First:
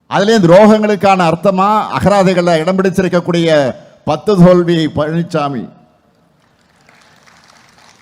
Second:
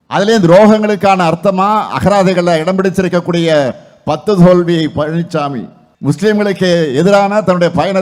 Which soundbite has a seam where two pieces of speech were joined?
second; 1 cut; at 6.2 s

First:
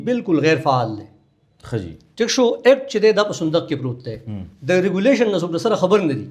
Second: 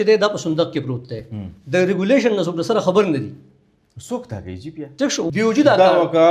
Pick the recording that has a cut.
second; 1 cut; at 5.3 s

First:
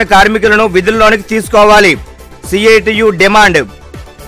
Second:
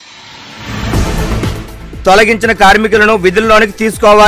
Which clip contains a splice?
second; 1 cut; at 1.4 s

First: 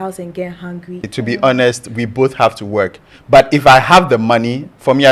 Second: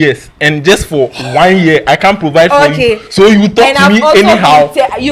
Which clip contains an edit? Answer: first; 1 cut; at 1.1 s

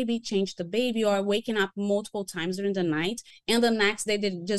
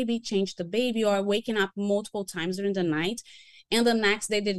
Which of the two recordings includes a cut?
first; 1 cut; at 3.3 s

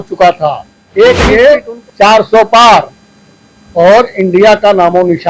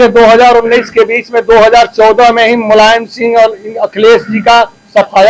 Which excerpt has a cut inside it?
first; 1 cut; at 1.2 s

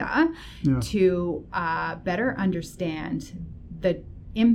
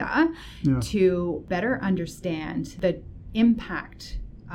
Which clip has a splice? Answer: second; 2 cuts; at 1.4 s, 2.7 s

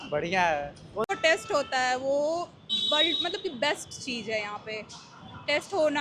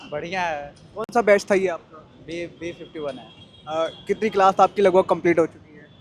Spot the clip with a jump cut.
first; 1 cut; at 1.1 s

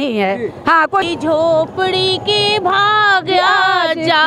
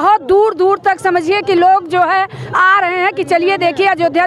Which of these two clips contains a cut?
first; 1 cut; at 1.0 s

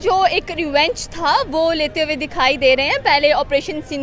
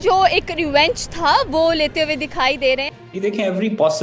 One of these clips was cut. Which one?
second; 1 cut; at 2.8 s

